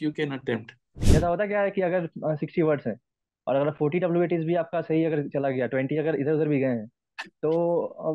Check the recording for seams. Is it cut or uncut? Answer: cut